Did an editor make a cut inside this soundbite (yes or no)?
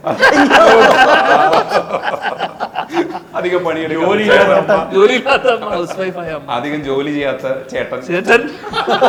no